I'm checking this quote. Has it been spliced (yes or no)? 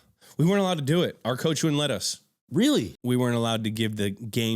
yes